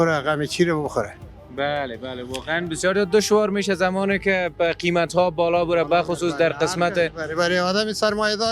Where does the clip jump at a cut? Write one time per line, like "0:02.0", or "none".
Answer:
none